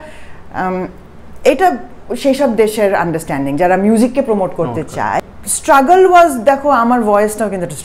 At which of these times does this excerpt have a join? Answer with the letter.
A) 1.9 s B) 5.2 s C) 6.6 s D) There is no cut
B